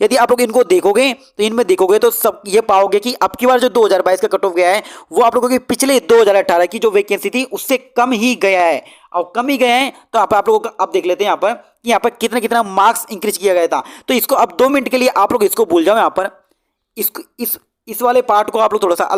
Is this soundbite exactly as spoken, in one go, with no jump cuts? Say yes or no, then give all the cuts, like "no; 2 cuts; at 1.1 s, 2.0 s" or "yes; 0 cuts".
yes; 0 cuts